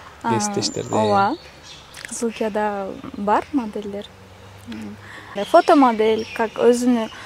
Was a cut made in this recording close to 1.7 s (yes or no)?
no